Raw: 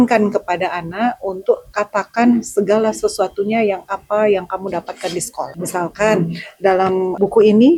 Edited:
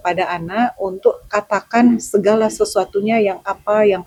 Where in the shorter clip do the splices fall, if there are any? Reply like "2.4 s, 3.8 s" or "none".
none